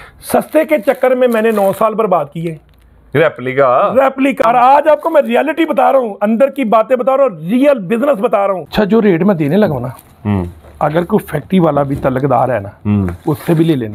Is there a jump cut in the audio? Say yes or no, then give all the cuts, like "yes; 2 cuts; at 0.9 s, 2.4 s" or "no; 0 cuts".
yes; 2 cuts; at 4.4 s, 8.6 s